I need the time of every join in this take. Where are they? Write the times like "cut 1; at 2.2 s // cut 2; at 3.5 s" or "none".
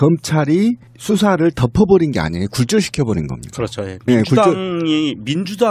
cut 1; at 2.1 s